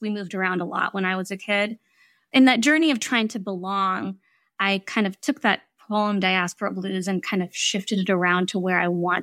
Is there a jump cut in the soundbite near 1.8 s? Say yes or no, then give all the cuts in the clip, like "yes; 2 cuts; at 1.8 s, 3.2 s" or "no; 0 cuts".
yes; 1 cut; at 1.8 s